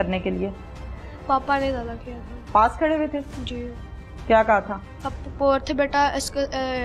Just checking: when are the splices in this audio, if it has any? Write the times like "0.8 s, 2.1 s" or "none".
none